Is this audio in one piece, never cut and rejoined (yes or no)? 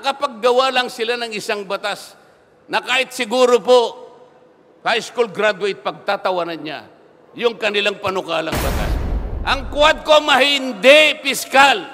no